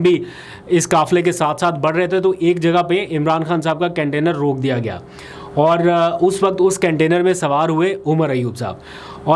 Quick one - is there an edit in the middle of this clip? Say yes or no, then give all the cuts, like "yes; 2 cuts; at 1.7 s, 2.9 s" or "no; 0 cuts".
no; 0 cuts